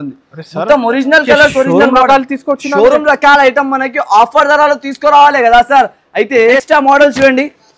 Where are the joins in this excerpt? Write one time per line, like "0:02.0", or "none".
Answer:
0:06.6